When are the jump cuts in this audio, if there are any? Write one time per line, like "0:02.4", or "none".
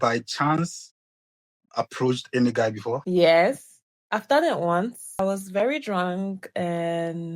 0:03.0
0:05.2